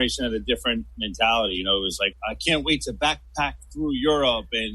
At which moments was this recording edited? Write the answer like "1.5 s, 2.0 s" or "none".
none

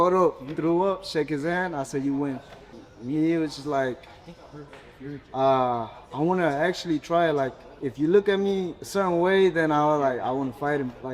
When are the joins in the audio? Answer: none

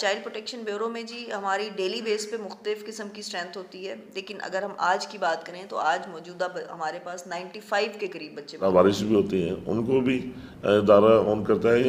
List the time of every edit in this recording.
8.5 s

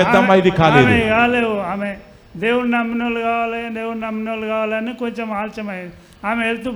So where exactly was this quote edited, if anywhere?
none

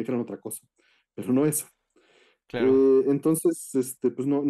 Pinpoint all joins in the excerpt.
none

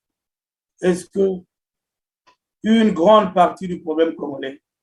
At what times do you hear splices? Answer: none

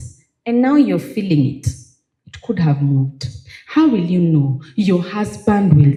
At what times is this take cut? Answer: none

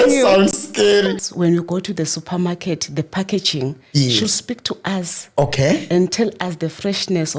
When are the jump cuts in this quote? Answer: 1.3 s

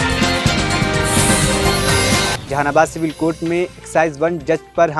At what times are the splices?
2.4 s

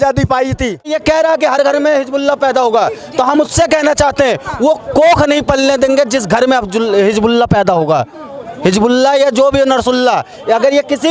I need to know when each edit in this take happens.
1.0 s

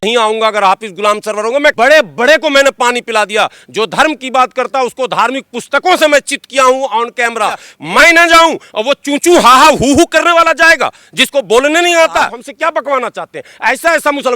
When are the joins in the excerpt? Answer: 1.7 s, 7.7 s

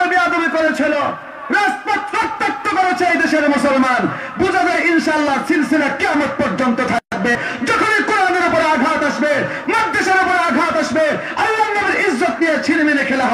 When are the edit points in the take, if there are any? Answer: none

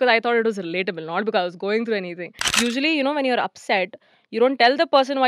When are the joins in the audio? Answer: 2.5 s

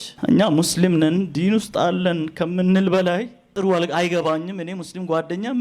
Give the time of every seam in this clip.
3.5 s

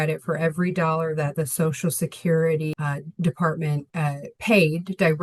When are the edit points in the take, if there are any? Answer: 2.7 s

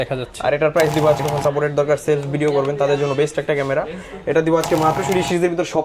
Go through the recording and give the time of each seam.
1.2 s, 5.0 s

